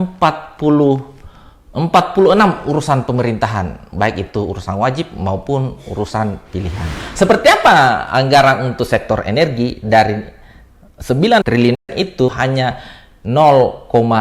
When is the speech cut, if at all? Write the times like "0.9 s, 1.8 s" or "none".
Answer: 7.0 s, 12.3 s